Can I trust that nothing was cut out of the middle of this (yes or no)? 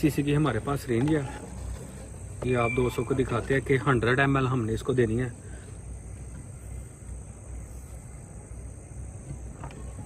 yes